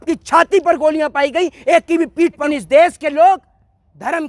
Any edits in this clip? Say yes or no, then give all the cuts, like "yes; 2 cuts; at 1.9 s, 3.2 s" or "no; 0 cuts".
yes; 1 cut; at 2.5 s